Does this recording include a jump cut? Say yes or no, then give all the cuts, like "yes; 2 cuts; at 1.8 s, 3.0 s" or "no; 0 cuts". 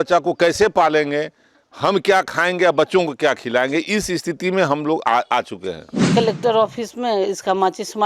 yes; 1 cut; at 6.1 s